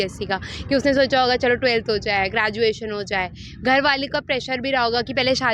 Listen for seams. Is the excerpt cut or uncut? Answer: uncut